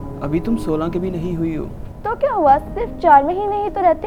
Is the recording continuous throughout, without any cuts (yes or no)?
yes